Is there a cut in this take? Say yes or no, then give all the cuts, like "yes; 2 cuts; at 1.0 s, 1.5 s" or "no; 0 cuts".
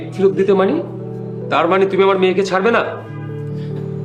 no; 0 cuts